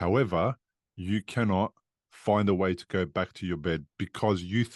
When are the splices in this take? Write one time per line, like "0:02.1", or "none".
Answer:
none